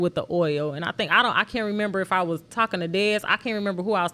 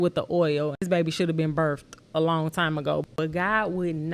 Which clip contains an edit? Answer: second; 2 cuts; at 0.8 s, 3.1 s

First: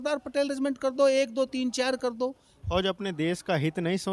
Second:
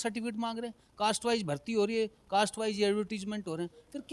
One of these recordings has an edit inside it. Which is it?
first; 1 cut; at 2.5 s

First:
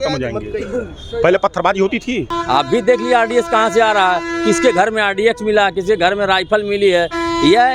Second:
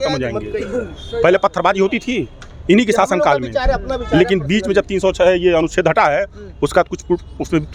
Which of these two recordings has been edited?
first; 1 cut; at 2.3 s

